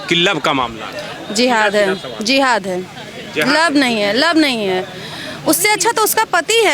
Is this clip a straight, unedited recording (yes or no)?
yes